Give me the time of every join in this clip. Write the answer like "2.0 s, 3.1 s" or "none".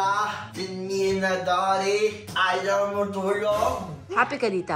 2.3 s

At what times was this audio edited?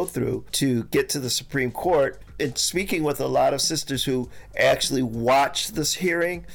2.3 s

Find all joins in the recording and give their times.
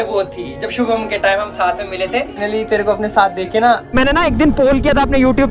2.4 s, 3.9 s

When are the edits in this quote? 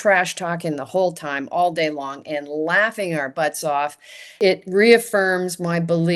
4.4 s

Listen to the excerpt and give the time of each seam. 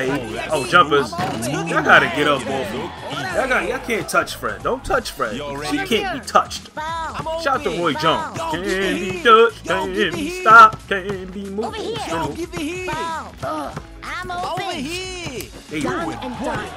none

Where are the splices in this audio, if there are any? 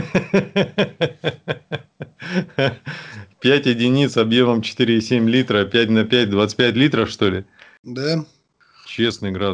none

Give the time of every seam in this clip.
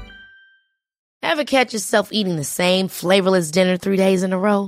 none

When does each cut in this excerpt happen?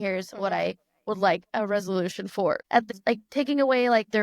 2.6 s

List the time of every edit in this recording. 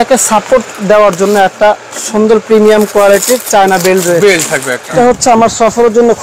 4.9 s

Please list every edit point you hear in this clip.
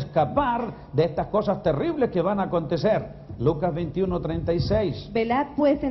1.2 s

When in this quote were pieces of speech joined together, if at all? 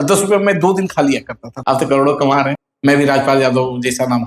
1.5 s, 2.7 s

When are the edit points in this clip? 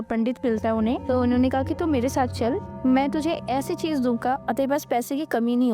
1.0 s, 2.7 s, 4.4 s

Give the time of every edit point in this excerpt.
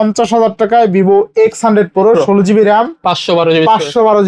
none

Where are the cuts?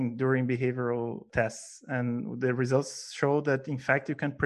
1.3 s

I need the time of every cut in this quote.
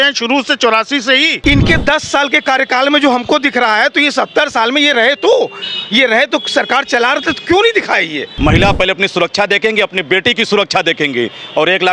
1.4 s, 8.2 s

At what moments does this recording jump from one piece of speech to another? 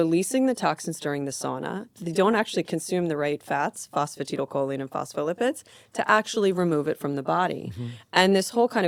none

